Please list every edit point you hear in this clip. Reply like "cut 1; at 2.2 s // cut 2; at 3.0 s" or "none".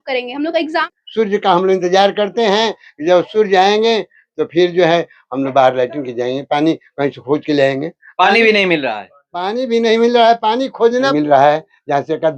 cut 1; at 0.8 s // cut 2; at 11.1 s